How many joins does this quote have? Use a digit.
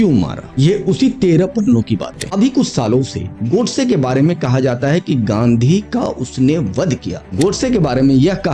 1